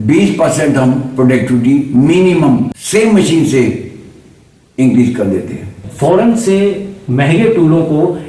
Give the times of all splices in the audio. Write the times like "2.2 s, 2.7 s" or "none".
2.8 s, 5.8 s